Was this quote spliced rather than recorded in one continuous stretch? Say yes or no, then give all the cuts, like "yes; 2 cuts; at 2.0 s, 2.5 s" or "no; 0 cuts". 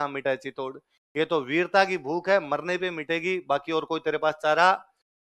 no; 0 cuts